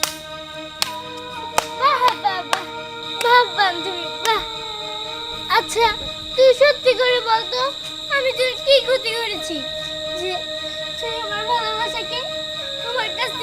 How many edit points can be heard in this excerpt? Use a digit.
0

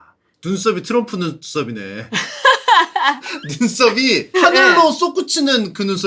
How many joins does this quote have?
1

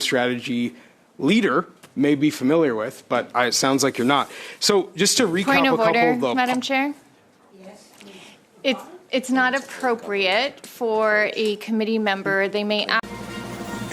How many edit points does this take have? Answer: 1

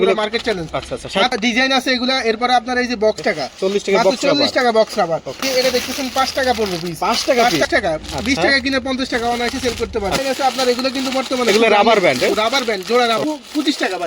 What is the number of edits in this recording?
6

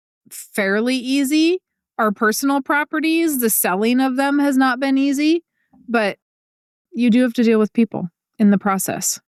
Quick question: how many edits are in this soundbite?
0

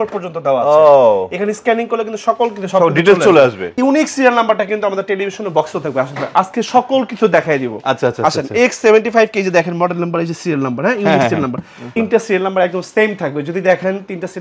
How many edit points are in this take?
2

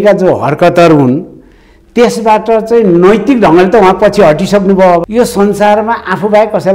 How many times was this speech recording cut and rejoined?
1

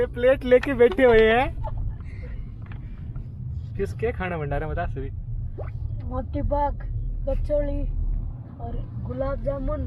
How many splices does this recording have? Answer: 1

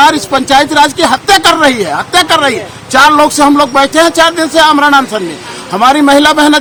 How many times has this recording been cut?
0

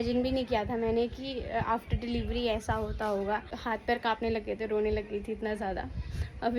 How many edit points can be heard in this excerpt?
1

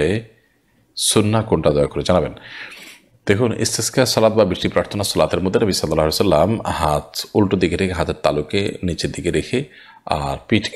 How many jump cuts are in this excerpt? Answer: 0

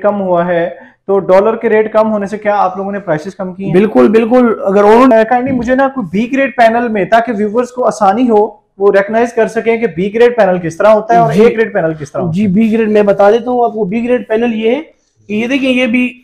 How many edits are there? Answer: 1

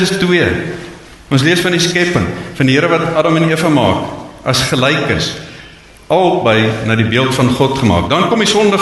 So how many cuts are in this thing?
0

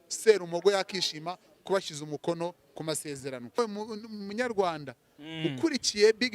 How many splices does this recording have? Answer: 1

